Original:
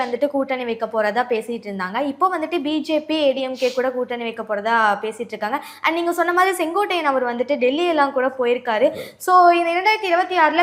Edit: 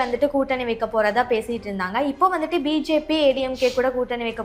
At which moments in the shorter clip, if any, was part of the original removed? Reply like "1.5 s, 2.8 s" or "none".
none